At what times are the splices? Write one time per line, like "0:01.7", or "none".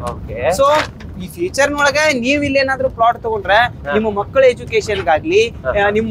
none